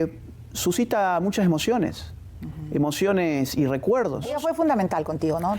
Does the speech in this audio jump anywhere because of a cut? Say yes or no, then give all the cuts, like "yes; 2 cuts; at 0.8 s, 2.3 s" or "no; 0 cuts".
yes; 1 cut; at 4.3 s